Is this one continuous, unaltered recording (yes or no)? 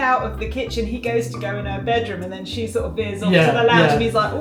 yes